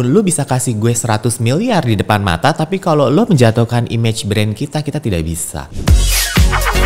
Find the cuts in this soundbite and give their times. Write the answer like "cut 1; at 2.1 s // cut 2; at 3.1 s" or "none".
cut 1; at 5.7 s